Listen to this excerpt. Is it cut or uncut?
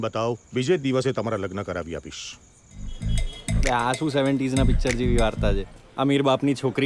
cut